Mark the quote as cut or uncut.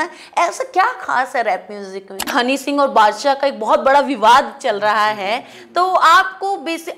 cut